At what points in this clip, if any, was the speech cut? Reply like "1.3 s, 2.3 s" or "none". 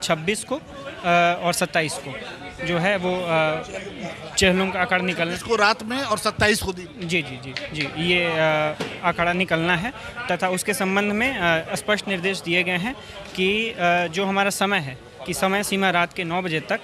none